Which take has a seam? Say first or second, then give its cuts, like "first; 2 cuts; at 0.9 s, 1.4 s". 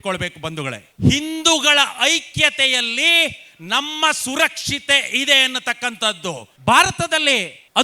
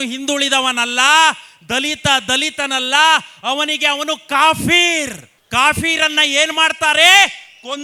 first; 2 cuts; at 0.9 s, 6.5 s